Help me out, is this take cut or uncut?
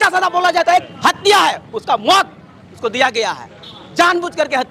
cut